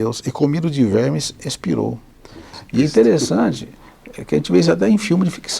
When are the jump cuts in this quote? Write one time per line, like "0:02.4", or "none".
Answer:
none